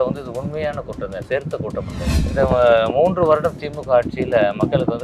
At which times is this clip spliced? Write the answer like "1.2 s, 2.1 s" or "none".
2.1 s